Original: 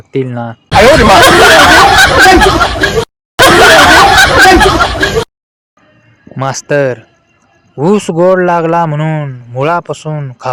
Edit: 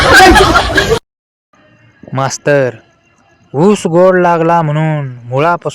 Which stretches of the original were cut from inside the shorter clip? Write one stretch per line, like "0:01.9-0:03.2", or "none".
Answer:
0:03.2-0:05.4